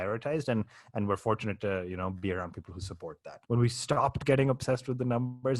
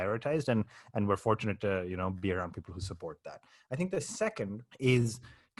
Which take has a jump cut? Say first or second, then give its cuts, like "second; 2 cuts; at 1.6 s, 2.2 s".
first; 1 cut; at 3.3 s